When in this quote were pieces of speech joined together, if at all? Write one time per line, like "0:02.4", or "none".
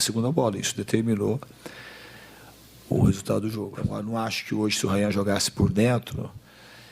0:03.8